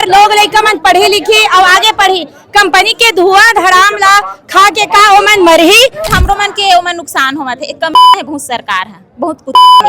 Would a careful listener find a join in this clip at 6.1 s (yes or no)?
yes